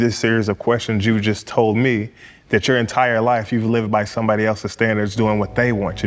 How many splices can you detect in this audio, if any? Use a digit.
0